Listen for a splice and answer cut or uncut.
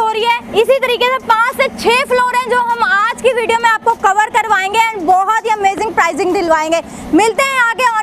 uncut